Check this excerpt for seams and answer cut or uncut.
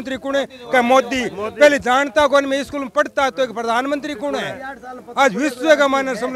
uncut